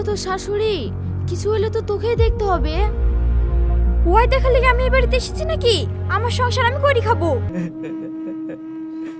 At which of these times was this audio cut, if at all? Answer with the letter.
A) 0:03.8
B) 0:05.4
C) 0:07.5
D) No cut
C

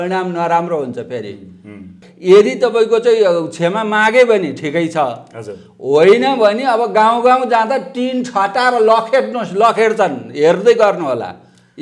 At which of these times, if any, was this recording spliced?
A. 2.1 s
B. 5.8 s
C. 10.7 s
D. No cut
A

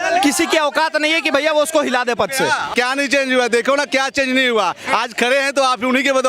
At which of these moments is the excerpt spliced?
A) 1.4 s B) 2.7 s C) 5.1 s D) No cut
B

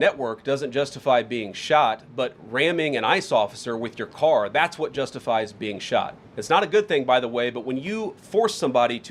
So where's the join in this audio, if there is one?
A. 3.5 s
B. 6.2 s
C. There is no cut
C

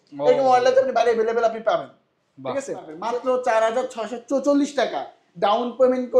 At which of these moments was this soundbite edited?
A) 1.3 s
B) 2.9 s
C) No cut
B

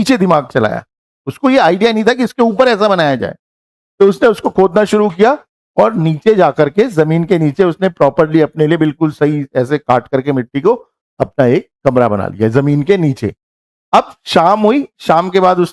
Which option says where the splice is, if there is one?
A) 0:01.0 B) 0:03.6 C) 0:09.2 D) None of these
D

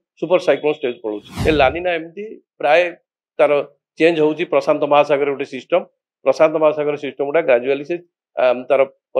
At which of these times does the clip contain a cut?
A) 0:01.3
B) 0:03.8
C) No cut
A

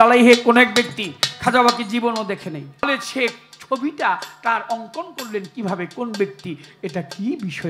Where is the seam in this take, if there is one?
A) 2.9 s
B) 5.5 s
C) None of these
A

